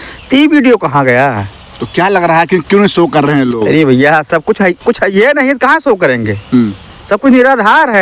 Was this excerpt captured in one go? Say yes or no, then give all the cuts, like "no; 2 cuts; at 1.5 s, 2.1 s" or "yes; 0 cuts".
yes; 0 cuts